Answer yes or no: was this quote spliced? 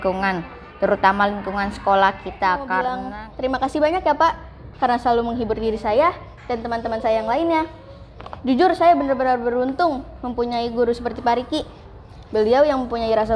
yes